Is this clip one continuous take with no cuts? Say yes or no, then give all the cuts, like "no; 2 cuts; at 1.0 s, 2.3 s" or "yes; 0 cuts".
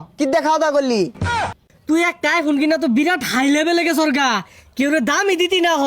no; 1 cut; at 1.3 s